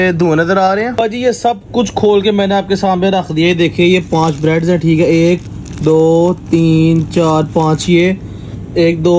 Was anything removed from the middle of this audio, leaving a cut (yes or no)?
yes